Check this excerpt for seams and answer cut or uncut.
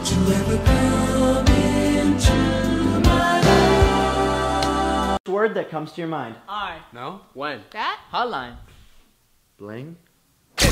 uncut